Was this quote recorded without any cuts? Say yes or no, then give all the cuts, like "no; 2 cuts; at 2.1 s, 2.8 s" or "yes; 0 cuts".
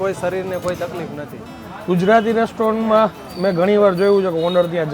no; 1 cut; at 1.7 s